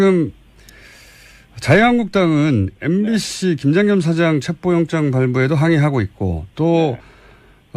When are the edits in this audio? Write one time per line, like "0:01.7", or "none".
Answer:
0:04.5